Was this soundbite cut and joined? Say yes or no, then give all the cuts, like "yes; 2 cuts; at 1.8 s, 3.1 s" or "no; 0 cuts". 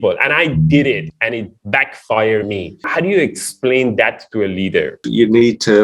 yes; 2 cuts; at 2.9 s, 5.0 s